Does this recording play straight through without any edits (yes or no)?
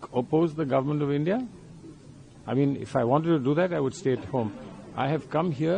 yes